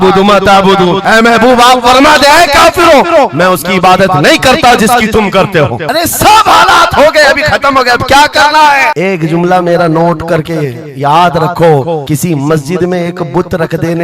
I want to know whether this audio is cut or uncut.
uncut